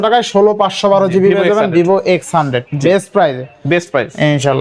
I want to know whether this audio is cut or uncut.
uncut